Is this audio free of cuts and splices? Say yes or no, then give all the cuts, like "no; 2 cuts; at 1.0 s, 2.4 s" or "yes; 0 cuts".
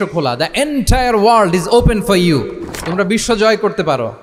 yes; 0 cuts